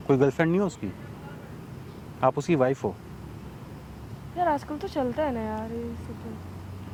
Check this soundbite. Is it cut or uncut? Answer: uncut